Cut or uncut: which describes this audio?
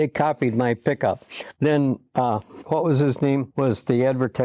cut